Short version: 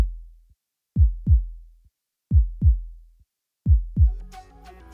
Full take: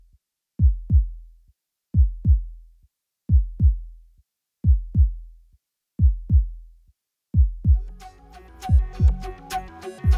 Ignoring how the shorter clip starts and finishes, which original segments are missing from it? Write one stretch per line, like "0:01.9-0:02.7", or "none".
0:05.0-0:07.7